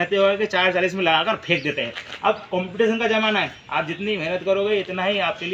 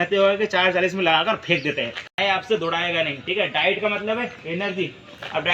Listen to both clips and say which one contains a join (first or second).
second